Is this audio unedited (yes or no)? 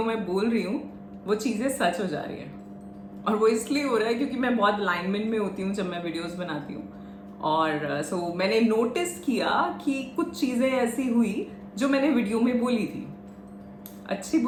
yes